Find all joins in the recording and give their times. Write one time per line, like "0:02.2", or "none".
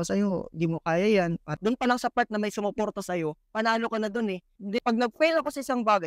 0:01.5
0:04.8